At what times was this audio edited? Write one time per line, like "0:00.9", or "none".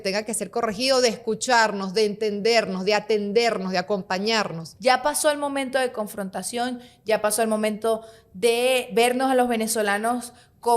0:04.6

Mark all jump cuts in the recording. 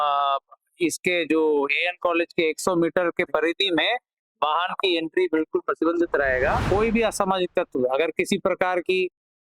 0:06.6

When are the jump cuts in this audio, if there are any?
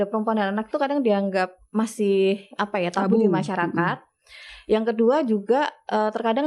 none

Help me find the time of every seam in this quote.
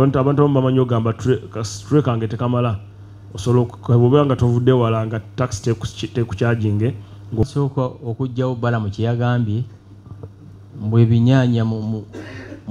0:07.5

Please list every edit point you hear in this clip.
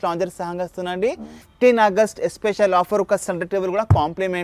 0:01.5

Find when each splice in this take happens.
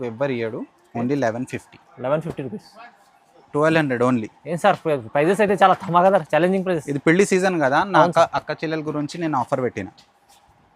0:03.5

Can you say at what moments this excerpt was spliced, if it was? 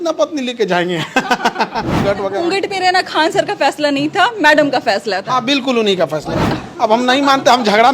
0:02.0
0:06.5

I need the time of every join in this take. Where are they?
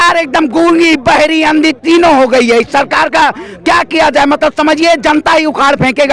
none

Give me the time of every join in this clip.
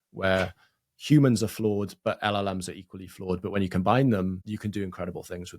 0:04.4

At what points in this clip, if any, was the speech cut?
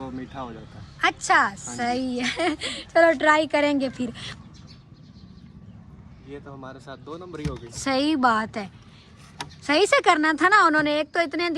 0:04.2

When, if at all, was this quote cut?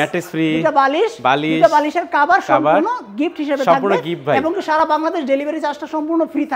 none

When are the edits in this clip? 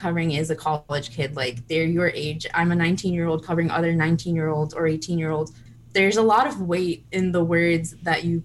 0:05.6

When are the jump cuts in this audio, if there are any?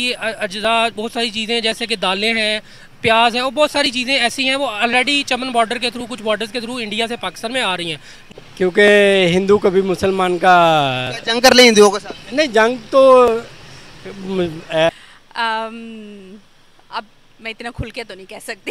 0:08.2
0:14.9

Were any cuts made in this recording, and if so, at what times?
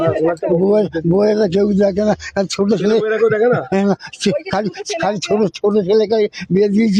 none

